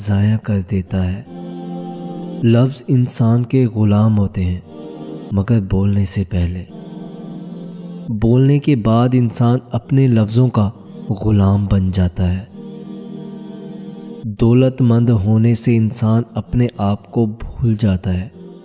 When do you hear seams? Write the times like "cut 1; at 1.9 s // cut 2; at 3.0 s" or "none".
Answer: cut 1; at 6.7 s // cut 2; at 8.0 s